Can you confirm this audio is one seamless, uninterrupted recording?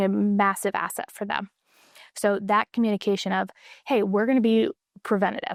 yes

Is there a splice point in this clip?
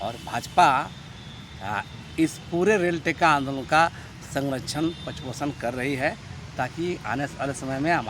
no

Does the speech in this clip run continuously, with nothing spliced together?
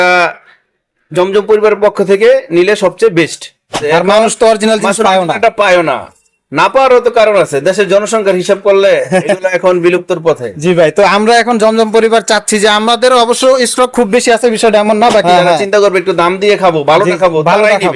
no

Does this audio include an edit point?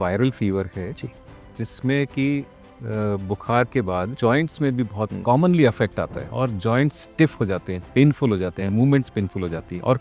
no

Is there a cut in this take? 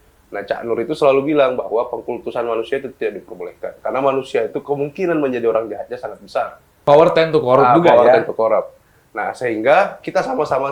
yes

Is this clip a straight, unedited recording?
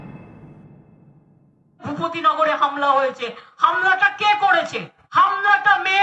no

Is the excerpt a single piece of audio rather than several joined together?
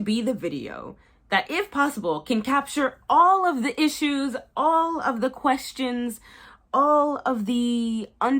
yes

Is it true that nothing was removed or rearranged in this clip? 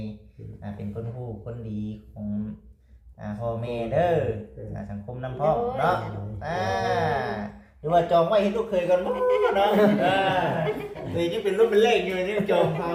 yes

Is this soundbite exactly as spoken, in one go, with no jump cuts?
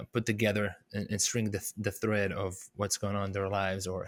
yes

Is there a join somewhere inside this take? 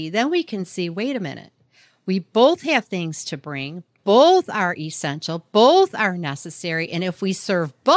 no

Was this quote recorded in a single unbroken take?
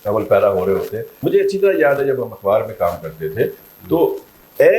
no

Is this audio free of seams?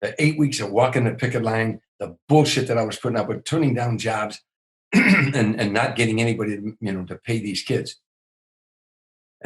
yes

